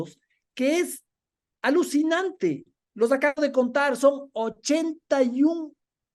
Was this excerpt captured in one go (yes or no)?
yes